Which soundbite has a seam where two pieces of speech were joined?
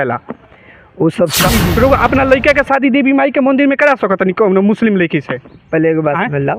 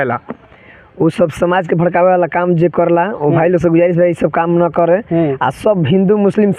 first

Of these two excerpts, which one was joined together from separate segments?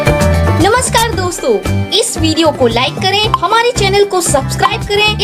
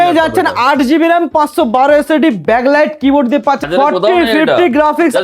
second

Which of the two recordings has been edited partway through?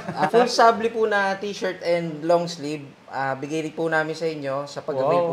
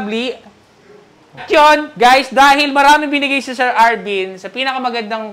second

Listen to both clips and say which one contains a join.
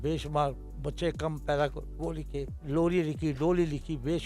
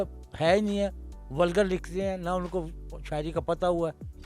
first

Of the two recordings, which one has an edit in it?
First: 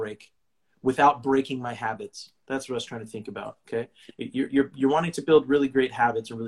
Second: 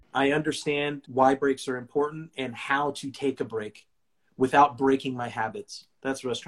second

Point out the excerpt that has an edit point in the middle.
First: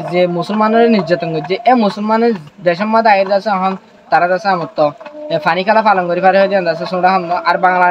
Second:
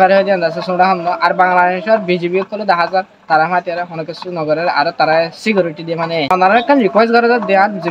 second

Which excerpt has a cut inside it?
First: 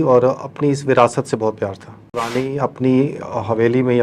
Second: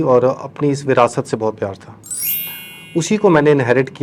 first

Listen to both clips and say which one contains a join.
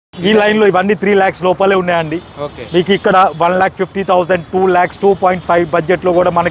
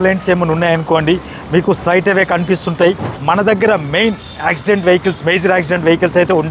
second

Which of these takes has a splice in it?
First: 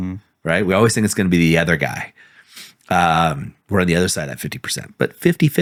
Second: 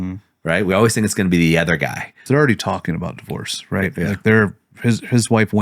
second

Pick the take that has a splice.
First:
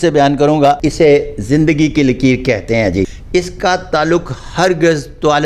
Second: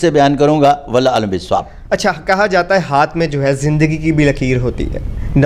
first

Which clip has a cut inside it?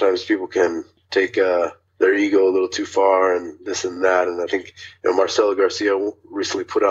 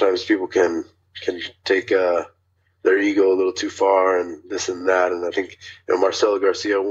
first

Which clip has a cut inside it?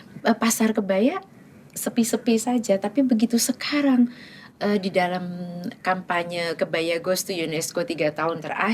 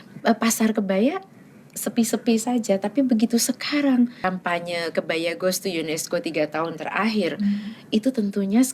second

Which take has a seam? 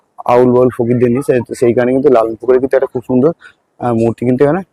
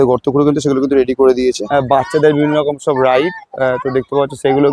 second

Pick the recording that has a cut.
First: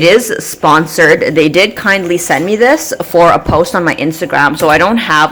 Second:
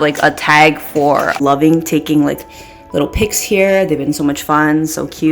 second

